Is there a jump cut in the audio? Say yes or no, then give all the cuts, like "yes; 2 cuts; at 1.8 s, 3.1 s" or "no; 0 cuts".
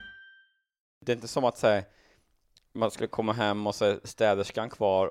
yes; 1 cut; at 1.0 s